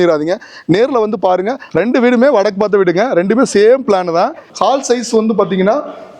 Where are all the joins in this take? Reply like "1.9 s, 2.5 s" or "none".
1.6 s, 4.4 s